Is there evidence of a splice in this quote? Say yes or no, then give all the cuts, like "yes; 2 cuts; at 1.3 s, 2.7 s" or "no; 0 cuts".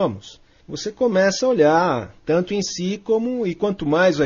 yes; 1 cut; at 3.4 s